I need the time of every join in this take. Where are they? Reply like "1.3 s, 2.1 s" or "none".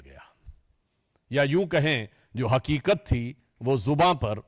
none